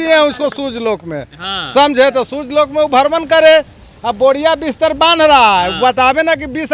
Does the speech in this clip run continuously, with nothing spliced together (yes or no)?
yes